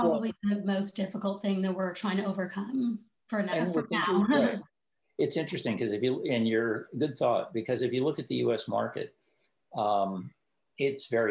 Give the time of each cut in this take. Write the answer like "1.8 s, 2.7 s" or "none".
none